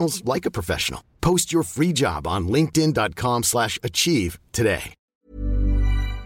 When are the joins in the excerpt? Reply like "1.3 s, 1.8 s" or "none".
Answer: 5.1 s

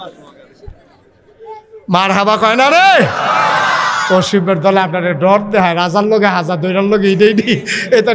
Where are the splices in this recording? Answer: none

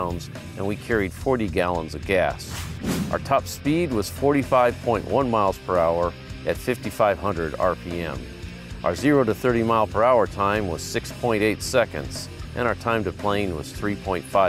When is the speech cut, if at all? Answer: 1.5 s

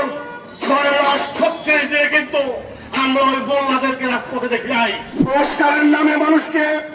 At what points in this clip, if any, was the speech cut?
5.3 s

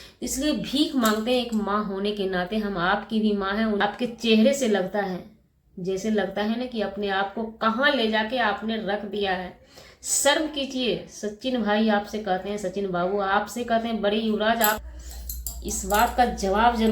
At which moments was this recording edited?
3.8 s, 14.9 s

